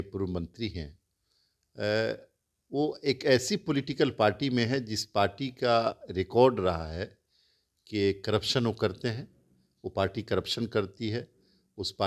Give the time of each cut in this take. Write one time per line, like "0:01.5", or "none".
none